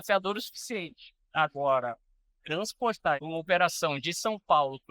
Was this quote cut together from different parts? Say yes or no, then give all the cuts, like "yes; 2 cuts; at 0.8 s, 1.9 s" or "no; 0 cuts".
yes; 1 cut; at 3.2 s